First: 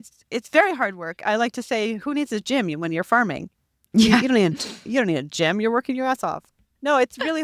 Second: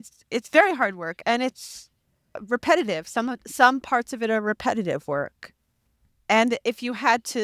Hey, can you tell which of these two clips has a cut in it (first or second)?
second